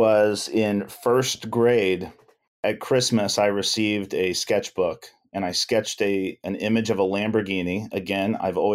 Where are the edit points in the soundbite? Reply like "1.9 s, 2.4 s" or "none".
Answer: 2.6 s